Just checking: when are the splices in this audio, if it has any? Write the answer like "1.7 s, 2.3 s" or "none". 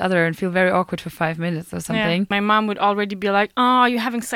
2.3 s